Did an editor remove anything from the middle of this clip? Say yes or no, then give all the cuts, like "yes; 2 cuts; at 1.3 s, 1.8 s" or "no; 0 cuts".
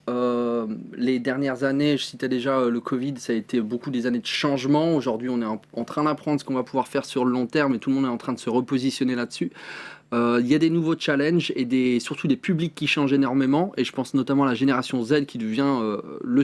no; 0 cuts